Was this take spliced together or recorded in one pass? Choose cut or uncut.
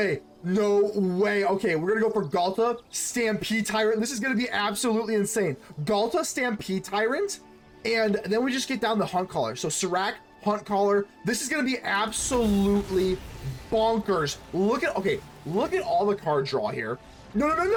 uncut